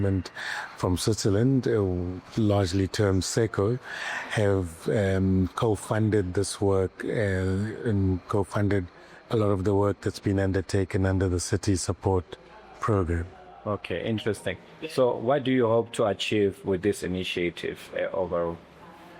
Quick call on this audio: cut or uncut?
uncut